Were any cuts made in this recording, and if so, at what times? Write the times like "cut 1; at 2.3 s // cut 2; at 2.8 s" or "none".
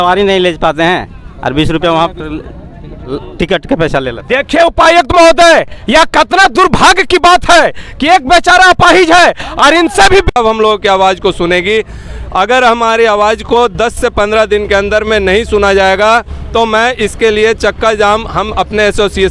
cut 1; at 10.4 s